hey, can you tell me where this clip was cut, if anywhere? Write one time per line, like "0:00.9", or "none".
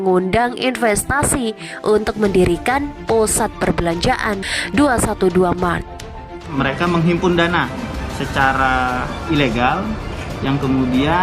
0:06.5